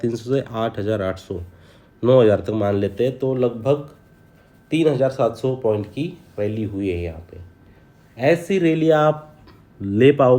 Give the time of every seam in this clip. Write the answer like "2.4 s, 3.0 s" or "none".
none